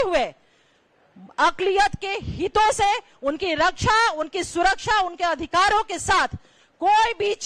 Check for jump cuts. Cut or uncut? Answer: uncut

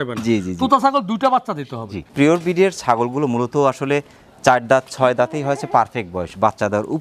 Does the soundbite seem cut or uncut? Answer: cut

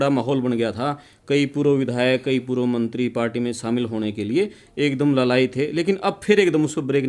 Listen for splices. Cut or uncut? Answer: uncut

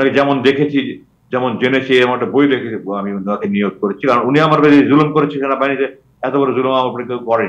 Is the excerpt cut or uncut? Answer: uncut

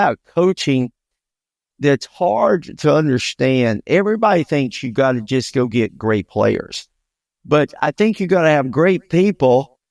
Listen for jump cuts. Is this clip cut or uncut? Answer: uncut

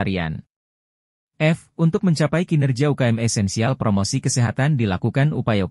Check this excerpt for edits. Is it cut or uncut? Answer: uncut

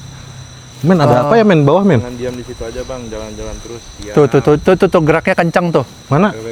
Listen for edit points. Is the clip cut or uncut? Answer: uncut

